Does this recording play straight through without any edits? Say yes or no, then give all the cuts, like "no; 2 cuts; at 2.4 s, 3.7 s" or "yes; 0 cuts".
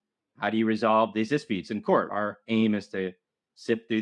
no; 1 cut; at 2.1 s